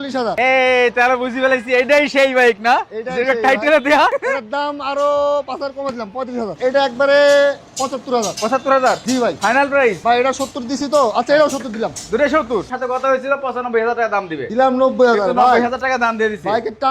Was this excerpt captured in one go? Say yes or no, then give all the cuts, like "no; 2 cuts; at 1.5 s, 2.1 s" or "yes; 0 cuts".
no; 3 cuts; at 6.5 s, 12.7 s, 14.4 s